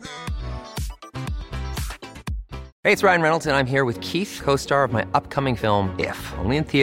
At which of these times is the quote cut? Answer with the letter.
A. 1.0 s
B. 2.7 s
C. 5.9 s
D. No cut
B